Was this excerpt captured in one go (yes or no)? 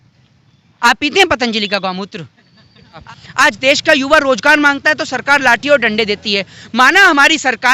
no